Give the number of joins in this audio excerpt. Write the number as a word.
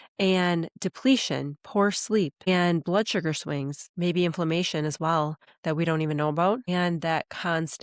four